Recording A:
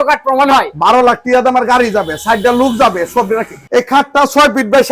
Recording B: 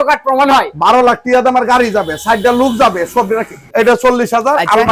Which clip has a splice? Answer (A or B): A